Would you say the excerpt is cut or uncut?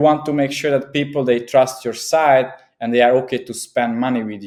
uncut